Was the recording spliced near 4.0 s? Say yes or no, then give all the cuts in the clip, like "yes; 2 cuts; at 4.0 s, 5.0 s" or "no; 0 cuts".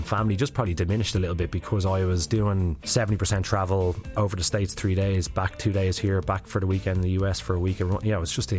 yes; 2 cuts; at 2.8 s, 4.0 s